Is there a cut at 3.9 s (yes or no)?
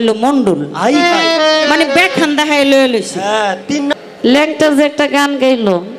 yes